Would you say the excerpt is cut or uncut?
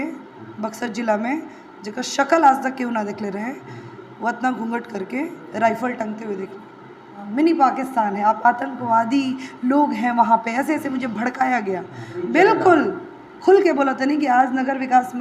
cut